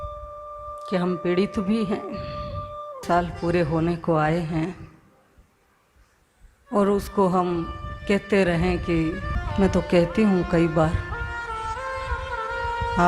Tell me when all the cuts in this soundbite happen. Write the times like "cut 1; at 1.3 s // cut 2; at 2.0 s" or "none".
cut 1; at 2.9 s // cut 2; at 9.3 s